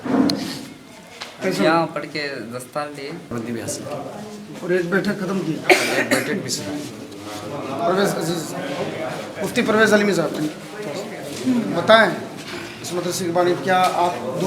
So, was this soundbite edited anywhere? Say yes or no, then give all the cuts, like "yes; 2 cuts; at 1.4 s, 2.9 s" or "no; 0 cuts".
yes; 1 cut; at 3.3 s